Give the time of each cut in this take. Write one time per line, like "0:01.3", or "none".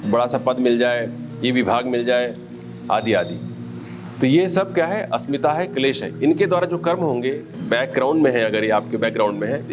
0:07.5

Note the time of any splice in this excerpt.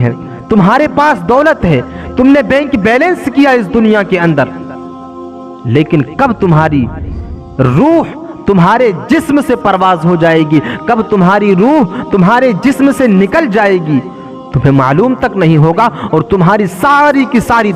none

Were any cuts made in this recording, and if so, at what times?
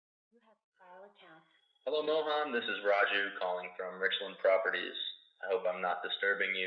0:01.1

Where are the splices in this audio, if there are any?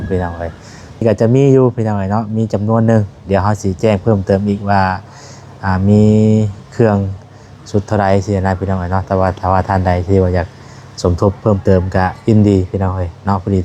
0:01.0

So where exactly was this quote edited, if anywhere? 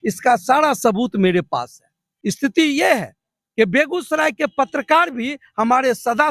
0:02.2

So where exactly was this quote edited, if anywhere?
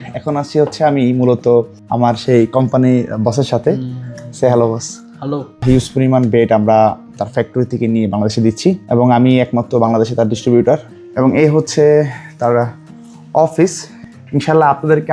0:05.6
0:10.9

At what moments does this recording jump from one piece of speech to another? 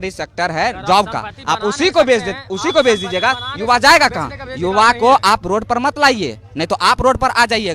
none

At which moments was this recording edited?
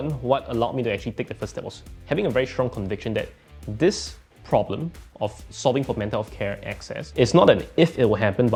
none

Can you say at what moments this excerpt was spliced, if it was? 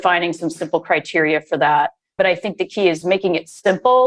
0:02.1
0:03.0

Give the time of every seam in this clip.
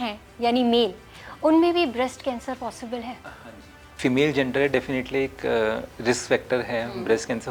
none

